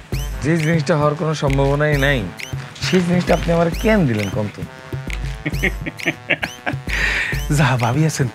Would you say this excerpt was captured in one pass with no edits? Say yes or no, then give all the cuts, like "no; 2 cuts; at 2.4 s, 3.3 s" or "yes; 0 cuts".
yes; 0 cuts